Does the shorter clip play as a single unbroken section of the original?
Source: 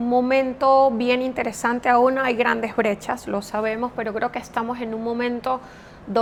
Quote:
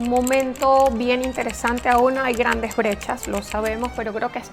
yes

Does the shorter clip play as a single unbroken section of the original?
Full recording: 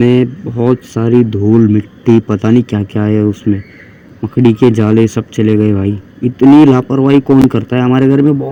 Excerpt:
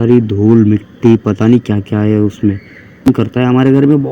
no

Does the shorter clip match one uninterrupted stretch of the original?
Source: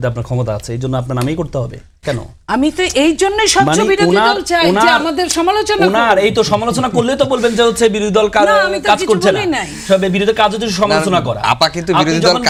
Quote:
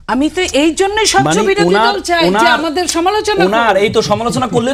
yes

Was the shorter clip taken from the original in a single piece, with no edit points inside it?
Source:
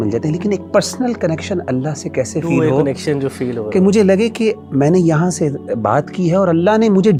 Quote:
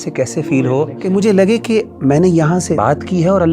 no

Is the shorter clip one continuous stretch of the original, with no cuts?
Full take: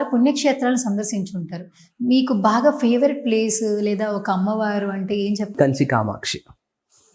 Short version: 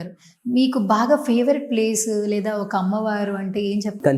yes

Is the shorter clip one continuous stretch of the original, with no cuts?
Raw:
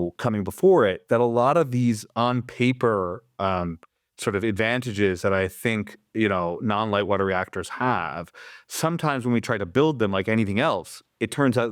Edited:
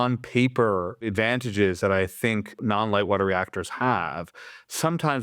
no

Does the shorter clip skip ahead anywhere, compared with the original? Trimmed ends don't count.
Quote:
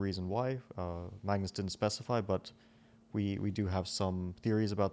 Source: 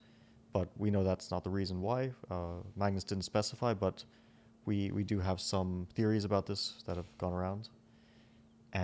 no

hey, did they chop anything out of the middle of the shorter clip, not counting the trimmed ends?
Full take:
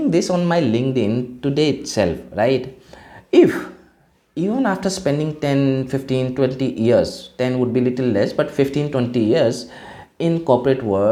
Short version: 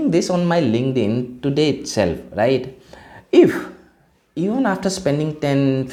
no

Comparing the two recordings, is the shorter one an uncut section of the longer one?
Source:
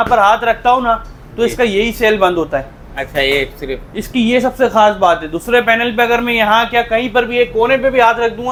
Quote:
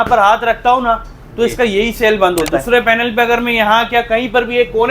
no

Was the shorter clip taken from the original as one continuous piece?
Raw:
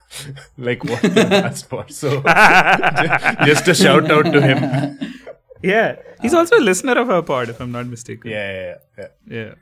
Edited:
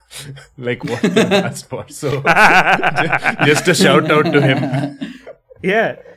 yes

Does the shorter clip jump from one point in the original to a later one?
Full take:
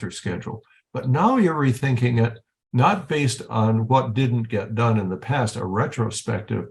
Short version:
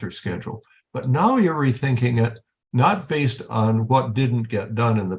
no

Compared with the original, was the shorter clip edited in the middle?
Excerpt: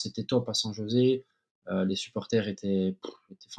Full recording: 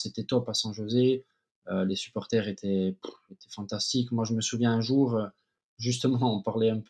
no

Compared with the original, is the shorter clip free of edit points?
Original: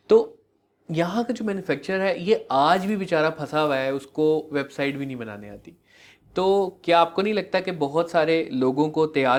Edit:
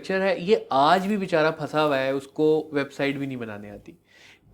yes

